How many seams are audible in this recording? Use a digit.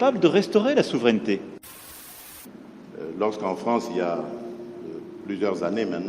1